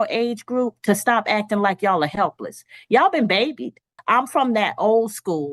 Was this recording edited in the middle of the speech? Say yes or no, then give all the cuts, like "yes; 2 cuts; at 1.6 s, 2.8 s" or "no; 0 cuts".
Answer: yes; 1 cut; at 3.9 s